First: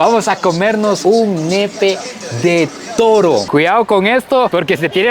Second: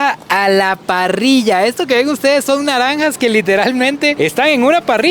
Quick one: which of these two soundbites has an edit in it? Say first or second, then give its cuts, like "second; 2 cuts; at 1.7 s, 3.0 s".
first; 1 cut; at 3.5 s